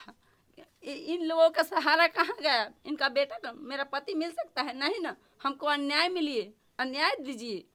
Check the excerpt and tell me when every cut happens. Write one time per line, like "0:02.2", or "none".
none